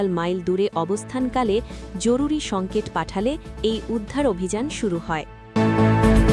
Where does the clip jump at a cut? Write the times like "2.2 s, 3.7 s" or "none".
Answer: 5.3 s